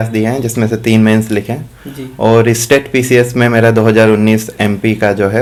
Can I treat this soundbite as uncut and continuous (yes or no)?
yes